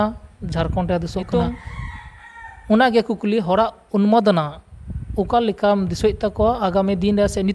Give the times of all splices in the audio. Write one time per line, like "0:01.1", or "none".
0:01.3